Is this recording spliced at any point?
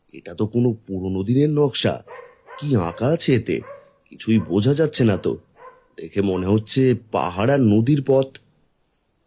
no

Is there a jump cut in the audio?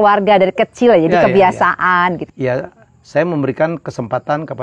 yes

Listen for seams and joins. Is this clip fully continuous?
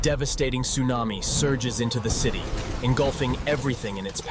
yes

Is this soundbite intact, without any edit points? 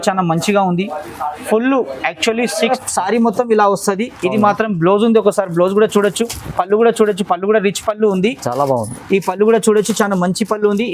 no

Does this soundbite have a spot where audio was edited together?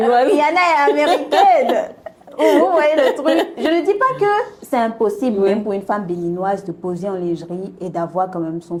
no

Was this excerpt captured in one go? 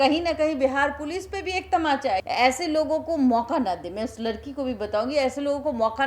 no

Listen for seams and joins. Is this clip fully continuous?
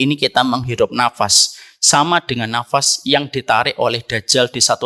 yes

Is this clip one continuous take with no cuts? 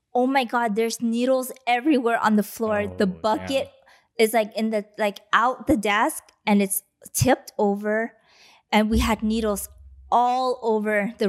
yes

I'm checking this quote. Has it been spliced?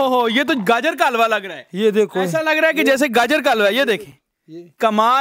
no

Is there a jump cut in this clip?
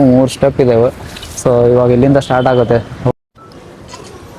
yes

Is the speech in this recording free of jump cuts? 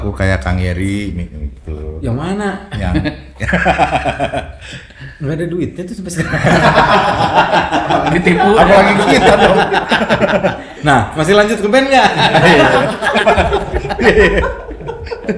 yes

